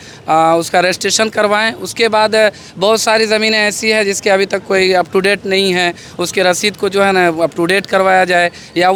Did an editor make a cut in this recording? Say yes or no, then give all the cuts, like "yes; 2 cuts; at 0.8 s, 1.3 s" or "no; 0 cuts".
no; 0 cuts